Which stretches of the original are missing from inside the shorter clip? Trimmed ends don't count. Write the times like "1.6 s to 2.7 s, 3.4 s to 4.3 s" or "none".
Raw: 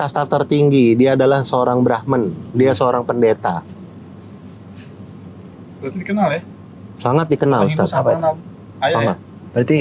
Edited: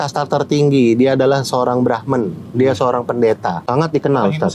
3.6 s to 7.0 s